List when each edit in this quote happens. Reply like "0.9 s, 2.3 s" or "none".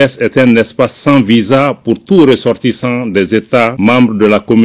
3.7 s